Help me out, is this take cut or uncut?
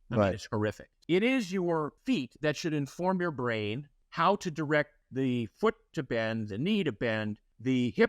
cut